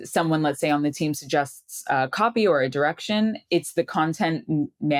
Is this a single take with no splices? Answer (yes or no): yes